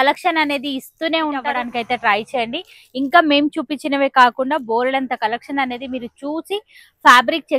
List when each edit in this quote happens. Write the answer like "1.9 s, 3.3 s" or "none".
1.5 s

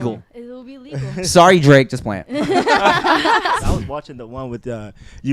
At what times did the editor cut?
3.6 s

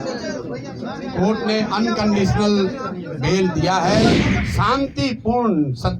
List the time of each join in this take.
4.3 s

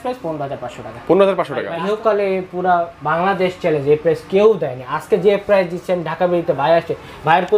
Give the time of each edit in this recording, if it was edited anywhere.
1.7 s

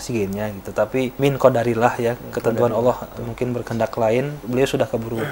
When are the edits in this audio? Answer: 1.2 s, 4.4 s

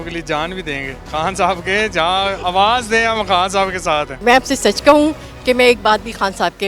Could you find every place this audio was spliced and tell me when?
1.0 s, 4.1 s

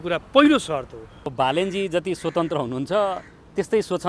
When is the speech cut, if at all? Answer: 1.3 s

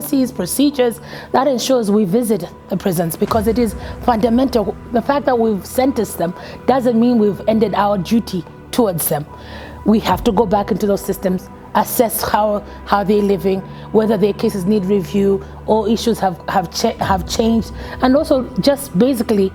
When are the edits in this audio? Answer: none

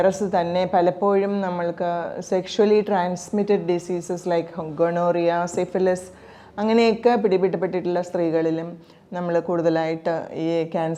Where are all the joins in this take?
none

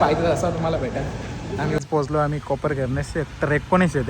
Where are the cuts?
1.8 s

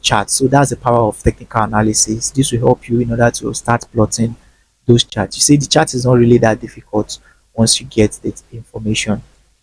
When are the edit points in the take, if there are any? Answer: none

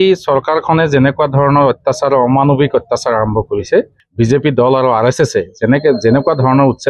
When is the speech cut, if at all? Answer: 4.0 s

